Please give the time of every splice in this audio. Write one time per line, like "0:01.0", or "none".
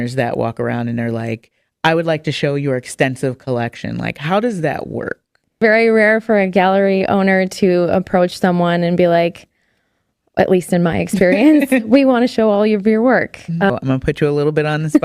0:05.6
0:13.7